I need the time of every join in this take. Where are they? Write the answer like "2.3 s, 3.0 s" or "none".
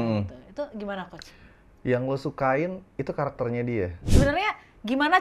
4.0 s